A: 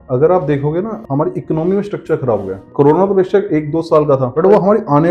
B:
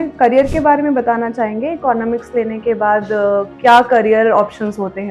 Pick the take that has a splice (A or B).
A